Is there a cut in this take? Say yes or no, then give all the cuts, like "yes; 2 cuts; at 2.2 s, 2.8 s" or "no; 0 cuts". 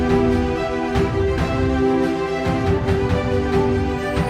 no; 0 cuts